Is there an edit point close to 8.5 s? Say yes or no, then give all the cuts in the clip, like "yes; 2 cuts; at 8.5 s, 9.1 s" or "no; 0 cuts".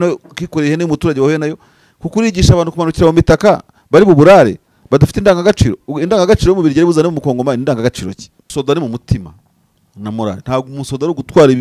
yes; 1 cut; at 8.5 s